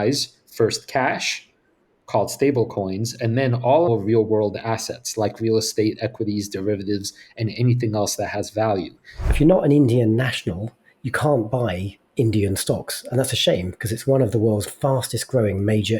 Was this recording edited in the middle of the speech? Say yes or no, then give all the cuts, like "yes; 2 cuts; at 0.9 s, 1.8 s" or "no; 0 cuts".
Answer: yes; 3 cuts; at 3.9 s, 9.3 s, 14.7 s